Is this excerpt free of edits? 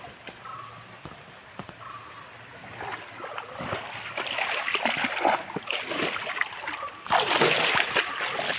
yes; 0 cuts

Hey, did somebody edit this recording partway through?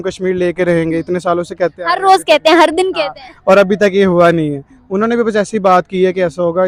no; 0 cuts

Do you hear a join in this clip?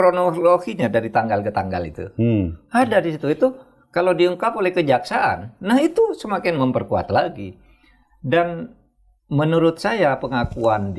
no; 0 cuts

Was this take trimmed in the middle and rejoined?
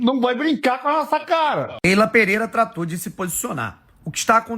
yes; 1 cut; at 1.7 s

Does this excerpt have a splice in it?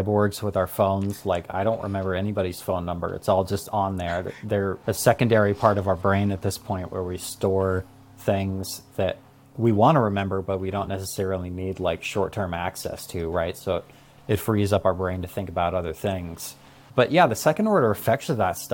no; 0 cuts

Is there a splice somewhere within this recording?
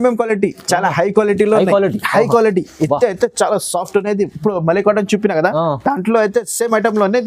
no; 0 cuts

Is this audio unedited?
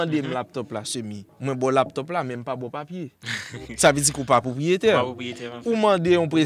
no; 1 cut; at 1.2 s

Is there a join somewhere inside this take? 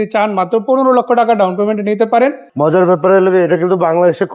yes; 1 cut; at 2.5 s

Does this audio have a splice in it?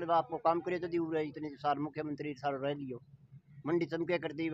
no; 0 cuts

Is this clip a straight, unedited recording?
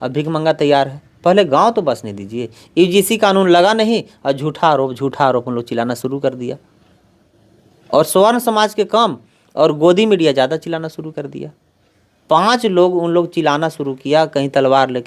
yes; 0 cuts

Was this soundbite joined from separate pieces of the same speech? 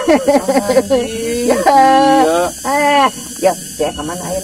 no; 0 cuts

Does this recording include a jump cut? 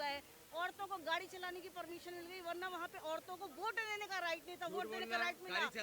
no; 0 cuts

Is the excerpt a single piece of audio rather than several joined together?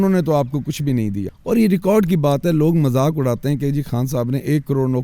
no; 1 cut; at 1.3 s

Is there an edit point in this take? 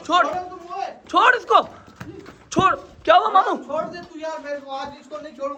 no; 0 cuts

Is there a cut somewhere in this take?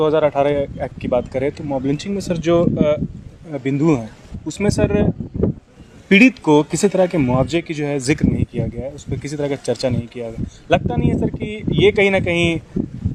no; 0 cuts

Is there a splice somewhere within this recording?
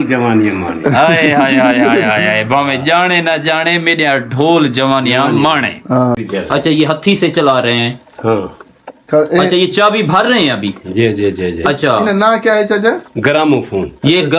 yes; 1 cut; at 6.2 s

